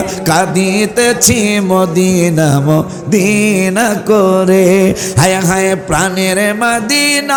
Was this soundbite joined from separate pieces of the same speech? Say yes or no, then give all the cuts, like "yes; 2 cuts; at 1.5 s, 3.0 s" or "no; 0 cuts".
no; 0 cuts